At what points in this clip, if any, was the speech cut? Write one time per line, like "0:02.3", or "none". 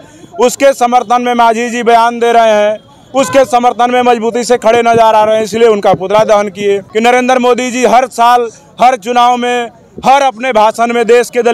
0:06.9